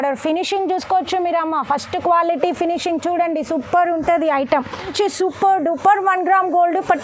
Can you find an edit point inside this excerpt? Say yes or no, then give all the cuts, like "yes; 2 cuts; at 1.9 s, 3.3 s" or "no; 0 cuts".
yes; 1 cut; at 4.9 s